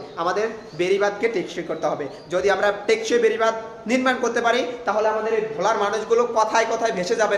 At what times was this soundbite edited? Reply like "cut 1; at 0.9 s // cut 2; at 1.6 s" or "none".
none